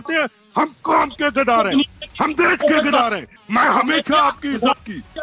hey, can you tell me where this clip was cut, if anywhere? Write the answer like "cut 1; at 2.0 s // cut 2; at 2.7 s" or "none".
cut 1; at 3.3 s